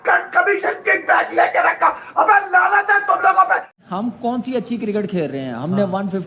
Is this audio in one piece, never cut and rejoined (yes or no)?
no